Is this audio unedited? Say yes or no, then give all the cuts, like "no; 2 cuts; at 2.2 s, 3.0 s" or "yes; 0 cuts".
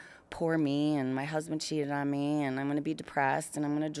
yes; 0 cuts